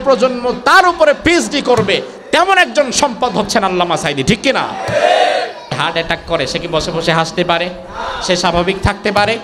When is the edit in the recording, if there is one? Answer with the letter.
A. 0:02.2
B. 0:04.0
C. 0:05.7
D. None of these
C